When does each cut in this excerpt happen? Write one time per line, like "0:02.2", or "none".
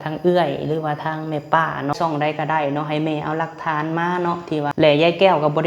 0:01.9
0:04.8